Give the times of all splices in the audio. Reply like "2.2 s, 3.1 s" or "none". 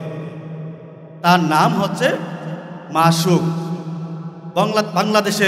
none